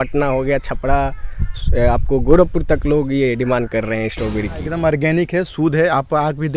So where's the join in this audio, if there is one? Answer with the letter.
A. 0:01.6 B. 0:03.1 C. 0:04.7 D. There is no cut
C